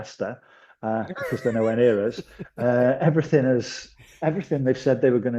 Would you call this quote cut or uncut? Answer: uncut